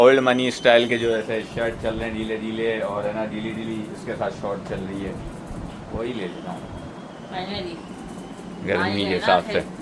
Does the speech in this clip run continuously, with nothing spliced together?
yes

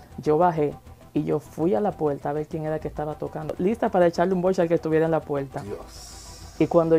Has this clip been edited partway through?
yes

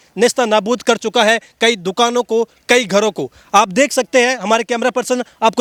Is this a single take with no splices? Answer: yes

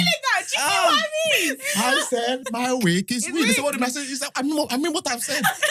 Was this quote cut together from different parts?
no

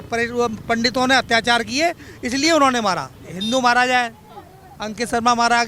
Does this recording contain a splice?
yes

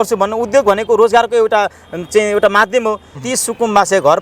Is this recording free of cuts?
no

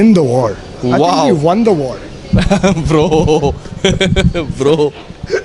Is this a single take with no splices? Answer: yes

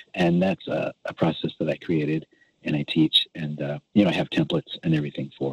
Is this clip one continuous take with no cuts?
yes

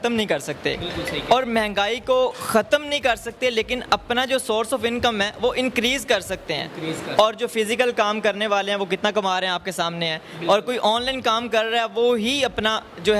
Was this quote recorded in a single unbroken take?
yes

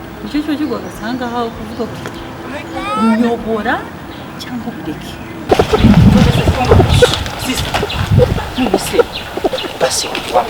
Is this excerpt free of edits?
no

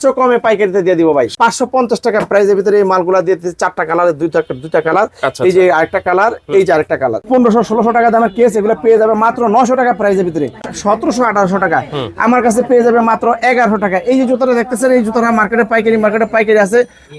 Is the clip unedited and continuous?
no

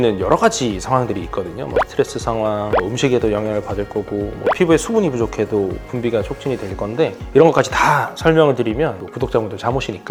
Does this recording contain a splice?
no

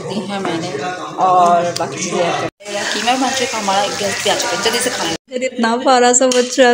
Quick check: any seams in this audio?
yes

